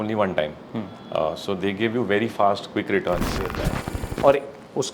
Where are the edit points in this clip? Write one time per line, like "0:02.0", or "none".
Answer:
0:03.5